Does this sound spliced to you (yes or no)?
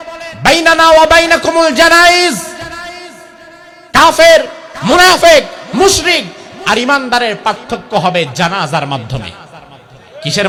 no